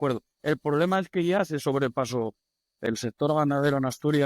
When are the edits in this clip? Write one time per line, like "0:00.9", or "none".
0:02.9